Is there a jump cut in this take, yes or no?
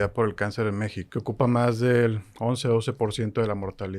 yes